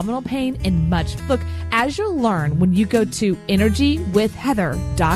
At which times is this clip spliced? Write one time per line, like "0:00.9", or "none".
0:01.1